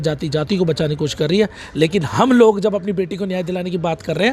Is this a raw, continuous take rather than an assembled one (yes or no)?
yes